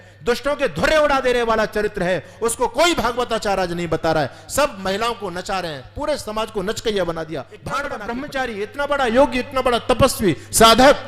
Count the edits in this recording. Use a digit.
1